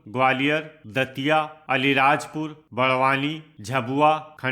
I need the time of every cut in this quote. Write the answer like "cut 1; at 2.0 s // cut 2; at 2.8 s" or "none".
cut 1; at 2.6 s // cut 2; at 3.5 s